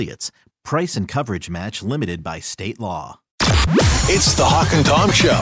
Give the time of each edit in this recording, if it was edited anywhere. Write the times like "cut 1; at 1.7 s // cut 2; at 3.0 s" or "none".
cut 1; at 3.3 s